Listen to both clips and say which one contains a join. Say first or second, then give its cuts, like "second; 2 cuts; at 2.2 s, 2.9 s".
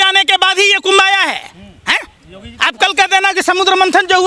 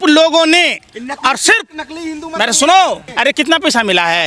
second; 1 cut; at 3.0 s